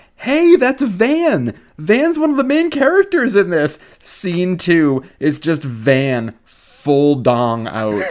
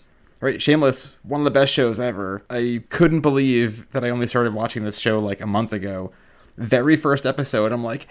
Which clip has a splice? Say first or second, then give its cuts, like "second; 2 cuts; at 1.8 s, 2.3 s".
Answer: second; 3 cuts; at 1.1 s, 2.8 s, 3.8 s